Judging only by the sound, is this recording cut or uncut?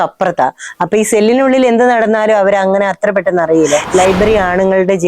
cut